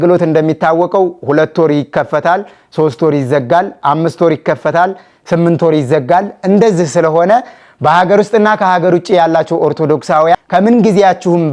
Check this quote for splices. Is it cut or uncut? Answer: uncut